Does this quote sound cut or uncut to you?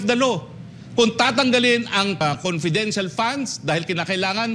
cut